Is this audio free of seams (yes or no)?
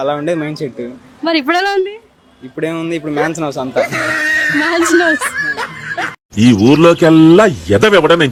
yes